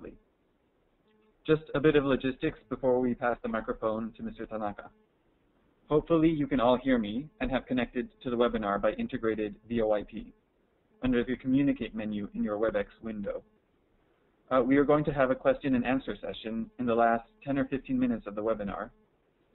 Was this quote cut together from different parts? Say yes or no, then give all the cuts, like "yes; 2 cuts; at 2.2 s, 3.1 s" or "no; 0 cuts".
no; 0 cuts